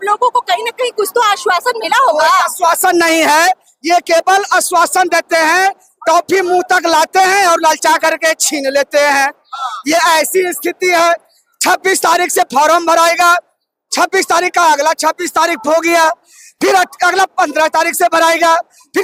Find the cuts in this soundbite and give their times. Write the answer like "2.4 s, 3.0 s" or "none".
none